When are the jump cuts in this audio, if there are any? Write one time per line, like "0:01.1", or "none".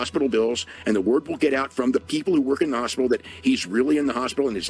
none